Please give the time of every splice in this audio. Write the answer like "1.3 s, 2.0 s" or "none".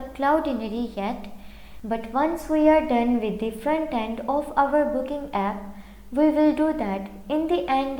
1.7 s